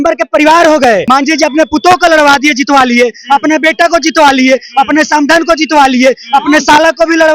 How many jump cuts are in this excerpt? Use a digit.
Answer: 1